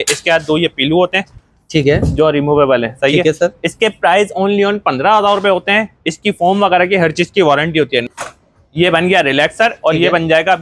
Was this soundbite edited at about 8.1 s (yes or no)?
yes